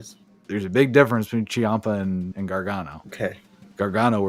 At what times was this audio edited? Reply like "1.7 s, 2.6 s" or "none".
2.5 s